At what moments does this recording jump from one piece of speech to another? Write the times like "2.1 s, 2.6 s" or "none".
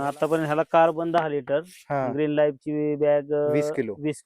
none